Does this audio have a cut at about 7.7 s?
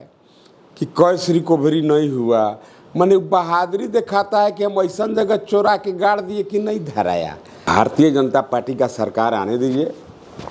yes; 1 cut; at 7.7 s

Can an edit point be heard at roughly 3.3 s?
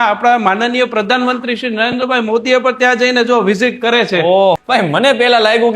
no; 1 cut; at 4.6 s

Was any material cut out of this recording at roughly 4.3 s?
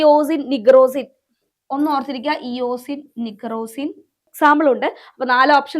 yes; 1 cut; at 4.3 s

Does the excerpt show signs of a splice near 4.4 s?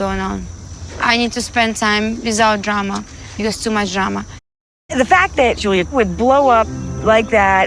yes; 1 cut; at 4.4 s

